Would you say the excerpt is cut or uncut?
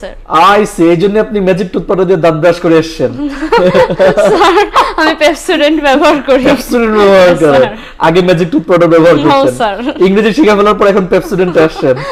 uncut